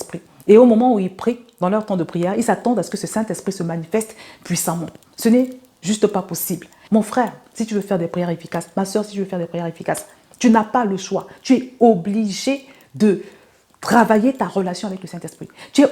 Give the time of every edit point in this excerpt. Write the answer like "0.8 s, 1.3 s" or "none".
6.8 s